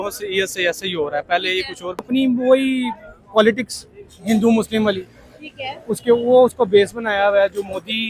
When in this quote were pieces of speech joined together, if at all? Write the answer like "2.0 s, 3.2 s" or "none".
2.0 s

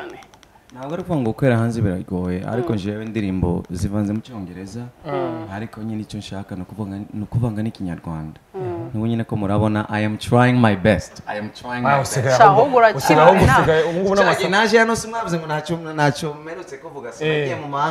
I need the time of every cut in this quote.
none

